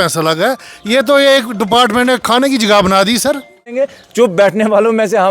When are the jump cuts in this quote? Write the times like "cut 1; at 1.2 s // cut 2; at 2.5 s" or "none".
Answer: cut 1; at 3.8 s